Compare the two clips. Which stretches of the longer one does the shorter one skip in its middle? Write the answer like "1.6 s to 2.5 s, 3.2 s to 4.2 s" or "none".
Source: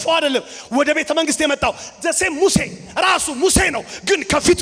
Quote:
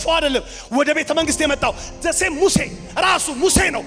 none